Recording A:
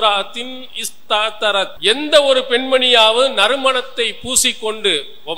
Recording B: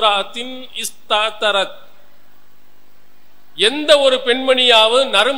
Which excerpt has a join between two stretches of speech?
A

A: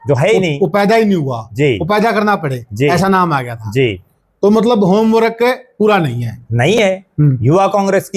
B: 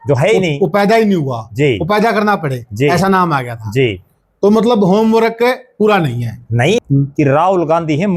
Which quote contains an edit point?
B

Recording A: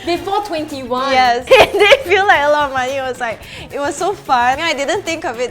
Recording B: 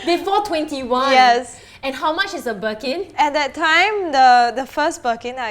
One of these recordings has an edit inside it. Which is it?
A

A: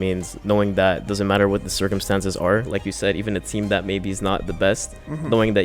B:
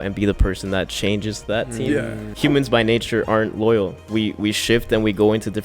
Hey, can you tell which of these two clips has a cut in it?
B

